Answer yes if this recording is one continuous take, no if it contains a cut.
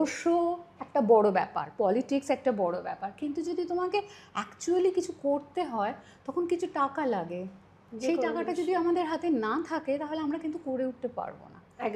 yes